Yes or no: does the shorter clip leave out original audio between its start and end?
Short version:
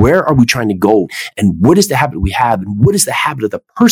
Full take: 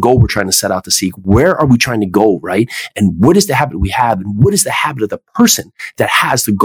yes